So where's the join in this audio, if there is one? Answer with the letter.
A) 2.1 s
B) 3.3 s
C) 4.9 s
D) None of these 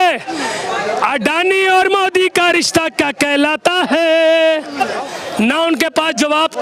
C